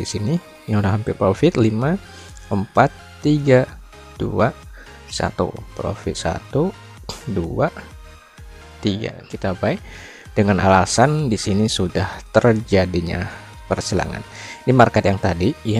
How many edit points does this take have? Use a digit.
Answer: 1